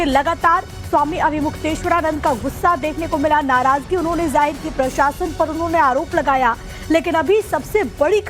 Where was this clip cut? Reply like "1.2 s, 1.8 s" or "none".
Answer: none